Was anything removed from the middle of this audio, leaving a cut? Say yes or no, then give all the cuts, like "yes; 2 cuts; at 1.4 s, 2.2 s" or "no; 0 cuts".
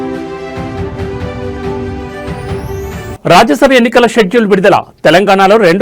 yes; 1 cut; at 3.1 s